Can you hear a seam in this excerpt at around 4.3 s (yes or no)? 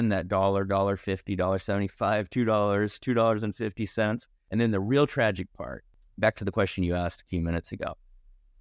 yes